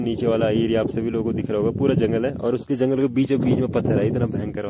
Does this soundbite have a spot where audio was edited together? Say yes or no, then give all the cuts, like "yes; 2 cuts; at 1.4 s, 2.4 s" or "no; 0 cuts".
no; 0 cuts